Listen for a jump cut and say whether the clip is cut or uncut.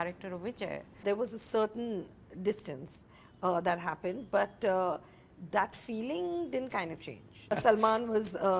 cut